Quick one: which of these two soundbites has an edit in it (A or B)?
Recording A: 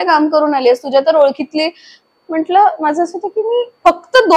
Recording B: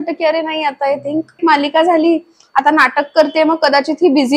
B